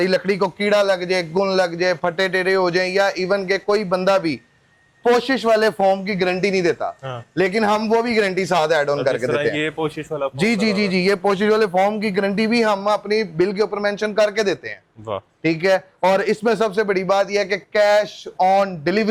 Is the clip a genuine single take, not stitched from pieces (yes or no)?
yes